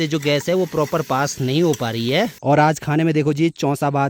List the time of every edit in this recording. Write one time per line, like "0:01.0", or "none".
0:02.4

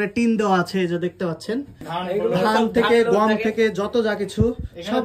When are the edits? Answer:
0:01.9

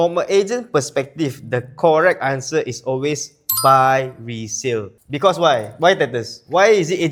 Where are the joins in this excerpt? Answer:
none

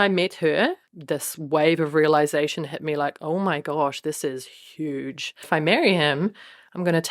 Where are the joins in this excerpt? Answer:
0:00.9
0:05.4

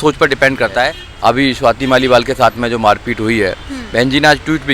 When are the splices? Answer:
0:01.0

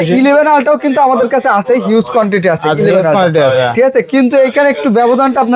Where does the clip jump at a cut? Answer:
none

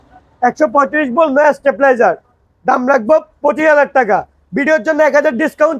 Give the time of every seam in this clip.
none

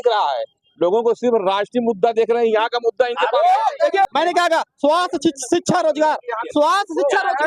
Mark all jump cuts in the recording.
0:04.1

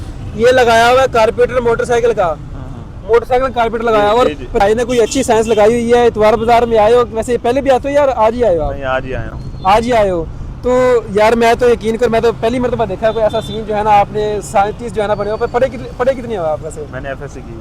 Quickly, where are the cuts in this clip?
0:04.6

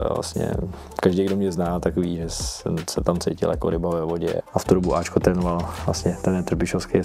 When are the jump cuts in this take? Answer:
0:04.4

